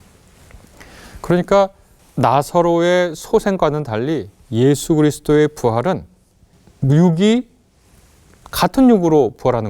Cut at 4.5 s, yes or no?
no